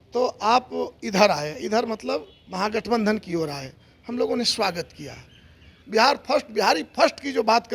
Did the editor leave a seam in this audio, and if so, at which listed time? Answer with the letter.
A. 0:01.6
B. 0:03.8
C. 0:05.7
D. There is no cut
C